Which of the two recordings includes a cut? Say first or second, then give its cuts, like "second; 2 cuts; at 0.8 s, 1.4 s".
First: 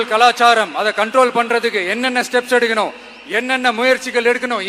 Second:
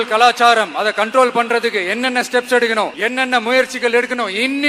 second; 1 cut; at 3.0 s